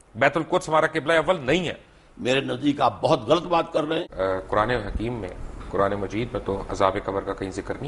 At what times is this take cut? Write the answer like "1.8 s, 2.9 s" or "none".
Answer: 4.0 s